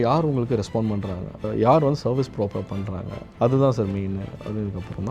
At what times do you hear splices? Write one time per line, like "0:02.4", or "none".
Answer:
0:03.2

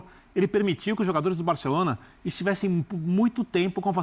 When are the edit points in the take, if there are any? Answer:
none

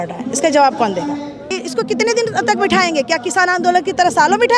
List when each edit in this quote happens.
0:01.5

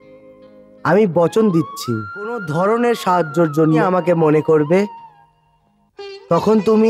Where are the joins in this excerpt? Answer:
0:02.4
0:03.8

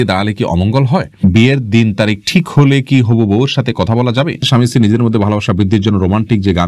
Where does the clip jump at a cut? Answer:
0:01.2
0:04.4

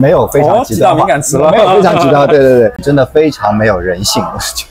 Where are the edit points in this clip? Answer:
0:02.8

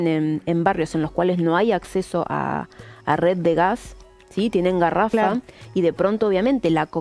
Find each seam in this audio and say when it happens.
none

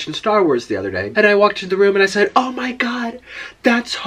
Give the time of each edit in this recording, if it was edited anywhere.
0:01.0

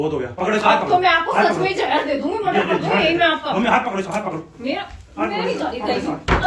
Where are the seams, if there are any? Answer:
none

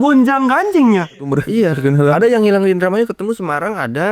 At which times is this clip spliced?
0:01.2

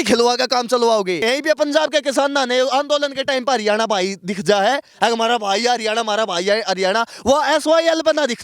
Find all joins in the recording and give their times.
0:01.2

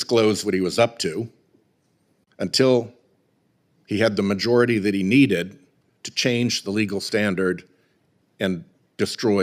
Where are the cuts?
none

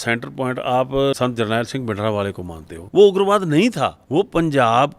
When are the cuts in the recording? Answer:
0:01.1
0:02.7
0:04.0

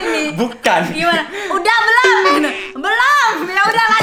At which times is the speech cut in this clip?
none

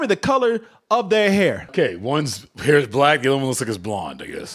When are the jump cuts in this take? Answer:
0:01.7

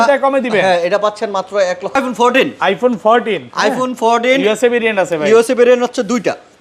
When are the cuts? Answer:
0:02.0

